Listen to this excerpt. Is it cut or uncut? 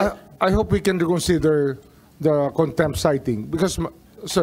uncut